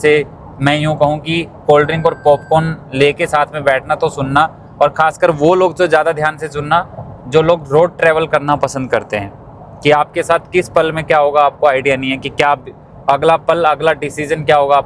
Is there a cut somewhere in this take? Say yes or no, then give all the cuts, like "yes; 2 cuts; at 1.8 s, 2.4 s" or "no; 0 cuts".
no; 0 cuts